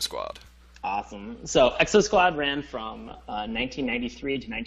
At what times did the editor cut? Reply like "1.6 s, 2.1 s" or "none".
1.1 s